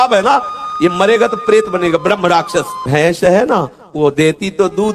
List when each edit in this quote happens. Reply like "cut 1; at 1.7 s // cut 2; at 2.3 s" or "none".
cut 1; at 2.8 s